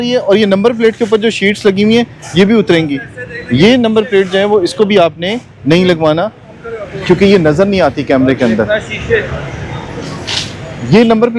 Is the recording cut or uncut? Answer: uncut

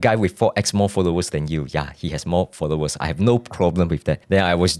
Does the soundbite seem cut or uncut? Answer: uncut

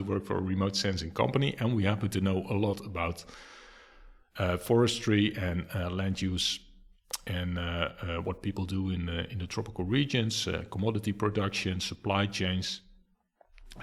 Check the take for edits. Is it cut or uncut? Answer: uncut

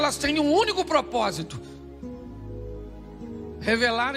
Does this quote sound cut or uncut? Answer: cut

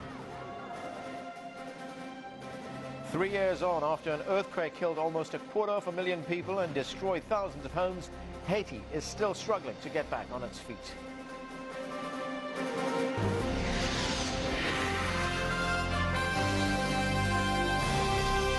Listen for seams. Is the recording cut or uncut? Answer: uncut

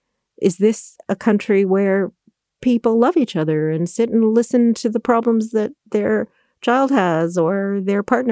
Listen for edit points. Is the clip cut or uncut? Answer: uncut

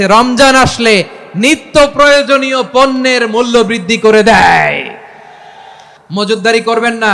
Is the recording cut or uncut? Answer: cut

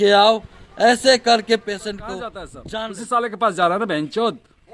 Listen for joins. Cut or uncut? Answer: cut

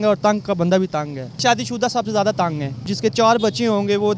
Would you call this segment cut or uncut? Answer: cut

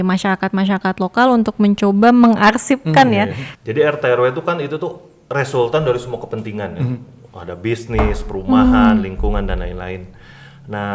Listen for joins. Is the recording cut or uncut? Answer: cut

